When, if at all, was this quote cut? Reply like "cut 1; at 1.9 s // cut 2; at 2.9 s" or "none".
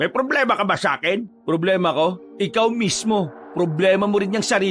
cut 1; at 1.3 s // cut 2; at 2.2 s // cut 3; at 3.4 s